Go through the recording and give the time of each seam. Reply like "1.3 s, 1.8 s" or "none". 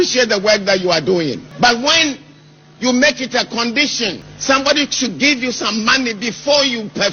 1.5 s, 4.3 s